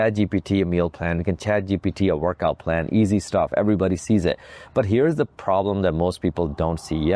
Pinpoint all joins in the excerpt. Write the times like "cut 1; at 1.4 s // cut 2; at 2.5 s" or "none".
none